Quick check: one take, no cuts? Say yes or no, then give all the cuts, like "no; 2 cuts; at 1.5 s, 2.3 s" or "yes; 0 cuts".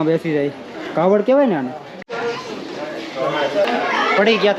no; 2 cuts; at 2.0 s, 3.6 s